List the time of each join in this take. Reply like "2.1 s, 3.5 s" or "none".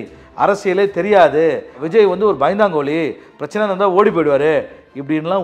1.8 s